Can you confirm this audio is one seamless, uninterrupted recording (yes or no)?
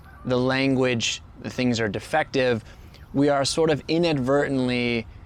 yes